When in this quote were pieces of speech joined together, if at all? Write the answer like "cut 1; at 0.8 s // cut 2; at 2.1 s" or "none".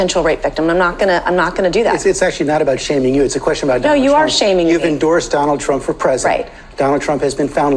none